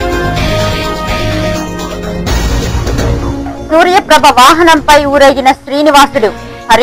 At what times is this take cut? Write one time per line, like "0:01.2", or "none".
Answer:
0:01.0